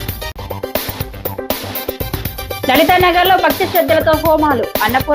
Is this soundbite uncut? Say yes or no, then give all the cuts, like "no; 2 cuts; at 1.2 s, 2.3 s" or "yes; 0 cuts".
yes; 0 cuts